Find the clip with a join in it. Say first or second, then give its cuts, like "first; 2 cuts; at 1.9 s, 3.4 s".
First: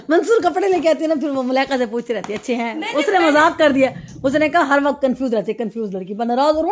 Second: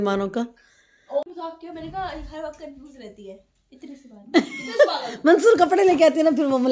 second; 1 cut; at 1.2 s